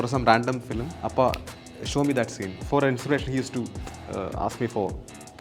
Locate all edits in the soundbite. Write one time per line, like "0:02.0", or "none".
0:01.0
0:02.5